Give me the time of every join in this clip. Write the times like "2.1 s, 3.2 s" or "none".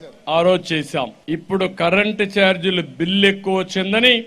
1.2 s